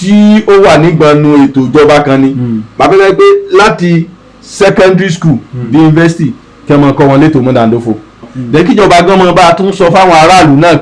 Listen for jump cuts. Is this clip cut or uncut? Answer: cut